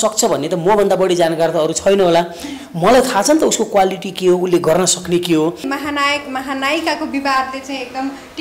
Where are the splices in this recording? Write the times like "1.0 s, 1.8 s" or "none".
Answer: 5.7 s